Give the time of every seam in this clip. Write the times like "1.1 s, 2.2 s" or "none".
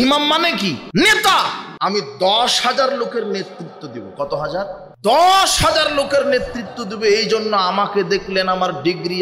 0.8 s, 1.6 s, 4.9 s